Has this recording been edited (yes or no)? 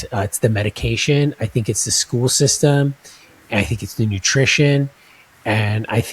no